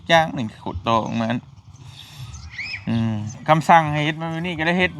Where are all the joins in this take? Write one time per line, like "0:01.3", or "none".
0:03.3